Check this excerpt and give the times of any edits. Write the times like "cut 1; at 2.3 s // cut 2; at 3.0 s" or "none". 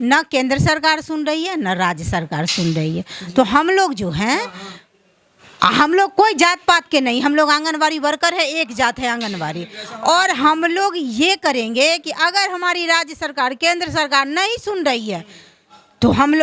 none